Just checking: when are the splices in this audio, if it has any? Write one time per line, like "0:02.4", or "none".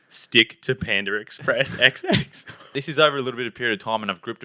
0:02.6